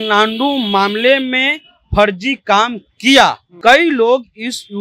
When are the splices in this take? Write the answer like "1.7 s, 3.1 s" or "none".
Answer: 3.5 s